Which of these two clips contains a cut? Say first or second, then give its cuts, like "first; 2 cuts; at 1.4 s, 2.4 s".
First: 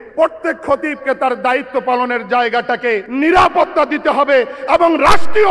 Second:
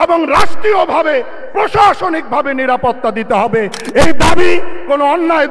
first; 1 cut; at 3.1 s